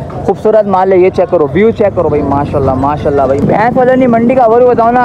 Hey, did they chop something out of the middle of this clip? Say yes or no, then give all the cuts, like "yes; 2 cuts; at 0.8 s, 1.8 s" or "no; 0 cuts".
yes; 1 cut; at 3.4 s